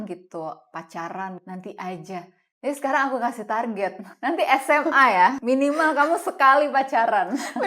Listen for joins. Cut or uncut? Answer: cut